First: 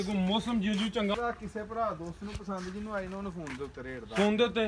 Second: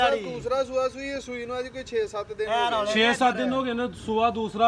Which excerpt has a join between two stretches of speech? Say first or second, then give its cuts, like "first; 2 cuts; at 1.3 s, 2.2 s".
first; 1 cut; at 1.1 s